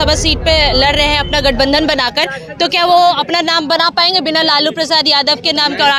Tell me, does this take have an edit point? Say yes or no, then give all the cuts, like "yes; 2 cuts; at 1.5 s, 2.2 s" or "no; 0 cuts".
no; 0 cuts